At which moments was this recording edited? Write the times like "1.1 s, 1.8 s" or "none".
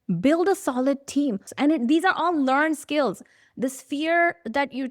1.5 s